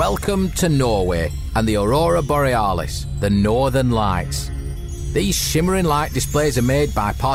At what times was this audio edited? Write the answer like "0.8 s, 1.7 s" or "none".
none